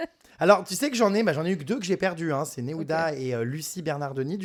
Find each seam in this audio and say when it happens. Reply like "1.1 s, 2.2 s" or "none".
none